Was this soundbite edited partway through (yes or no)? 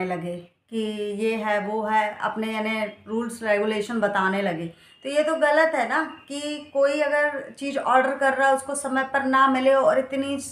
no